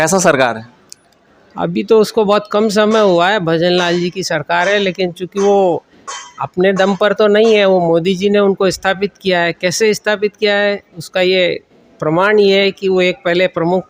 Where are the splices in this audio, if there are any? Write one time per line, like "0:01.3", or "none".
none